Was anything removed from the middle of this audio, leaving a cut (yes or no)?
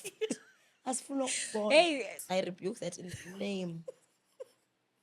yes